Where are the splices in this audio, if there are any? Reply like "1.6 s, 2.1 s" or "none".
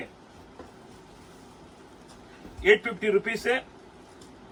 none